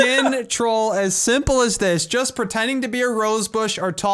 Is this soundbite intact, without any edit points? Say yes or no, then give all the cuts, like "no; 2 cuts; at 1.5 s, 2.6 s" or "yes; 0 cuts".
yes; 0 cuts